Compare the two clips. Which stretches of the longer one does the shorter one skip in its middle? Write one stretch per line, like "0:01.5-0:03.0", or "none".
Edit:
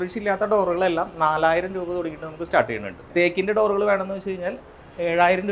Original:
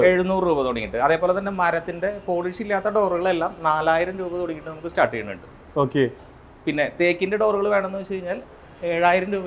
0:05.5-0:06.9